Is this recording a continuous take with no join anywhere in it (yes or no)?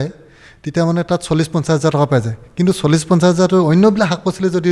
yes